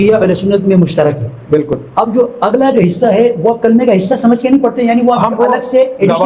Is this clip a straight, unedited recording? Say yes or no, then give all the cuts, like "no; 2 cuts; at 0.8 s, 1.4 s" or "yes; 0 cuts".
yes; 0 cuts